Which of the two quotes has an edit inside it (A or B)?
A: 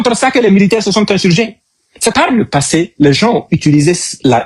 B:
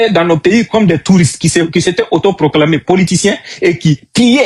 A